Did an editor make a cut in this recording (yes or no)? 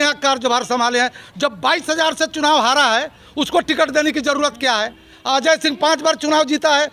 no